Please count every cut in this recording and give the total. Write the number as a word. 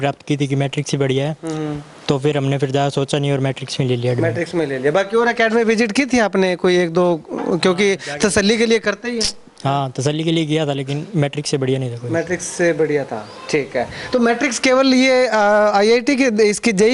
zero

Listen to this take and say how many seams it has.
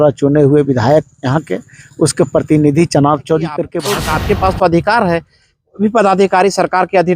one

